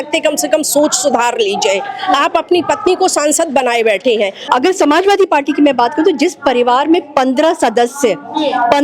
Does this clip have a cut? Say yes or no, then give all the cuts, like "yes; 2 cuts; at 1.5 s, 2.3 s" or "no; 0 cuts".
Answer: yes; 1 cut; at 4.4 s